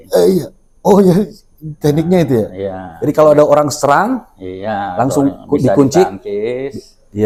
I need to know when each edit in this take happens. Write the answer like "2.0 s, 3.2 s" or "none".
none